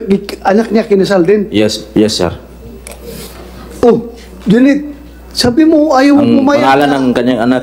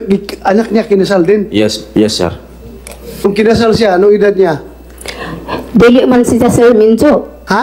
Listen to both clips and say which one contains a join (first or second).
second